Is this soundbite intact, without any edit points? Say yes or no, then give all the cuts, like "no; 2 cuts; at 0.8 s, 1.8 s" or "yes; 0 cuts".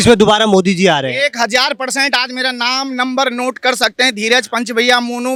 yes; 0 cuts